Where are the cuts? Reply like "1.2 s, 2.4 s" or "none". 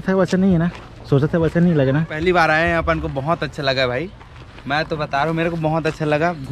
2.2 s